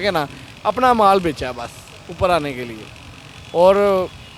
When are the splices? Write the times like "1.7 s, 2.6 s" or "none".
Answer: none

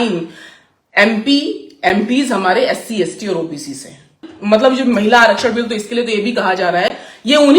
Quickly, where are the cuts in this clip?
4.3 s

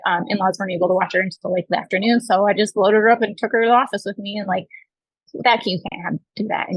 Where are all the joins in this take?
none

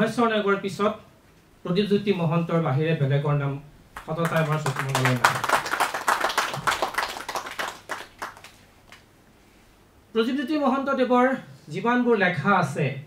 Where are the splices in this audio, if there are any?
none

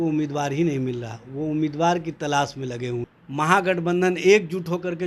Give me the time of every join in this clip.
3.2 s

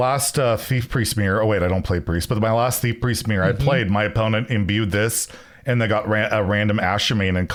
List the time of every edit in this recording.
none

